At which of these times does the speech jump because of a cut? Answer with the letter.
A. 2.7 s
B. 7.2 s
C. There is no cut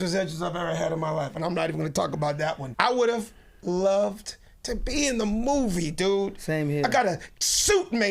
A